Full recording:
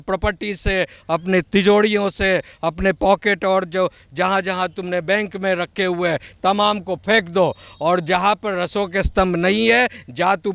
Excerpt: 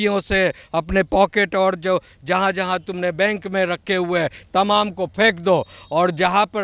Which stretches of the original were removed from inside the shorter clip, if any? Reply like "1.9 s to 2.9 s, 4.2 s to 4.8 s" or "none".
none